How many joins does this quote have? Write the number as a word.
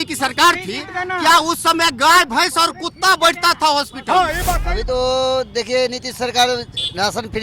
one